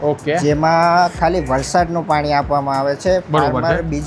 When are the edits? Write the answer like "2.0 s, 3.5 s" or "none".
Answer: none